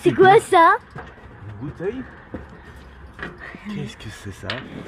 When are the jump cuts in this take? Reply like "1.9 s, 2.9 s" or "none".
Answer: none